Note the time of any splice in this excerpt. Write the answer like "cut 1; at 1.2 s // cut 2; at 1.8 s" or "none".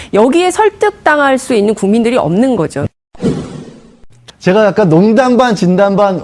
cut 1; at 2.8 s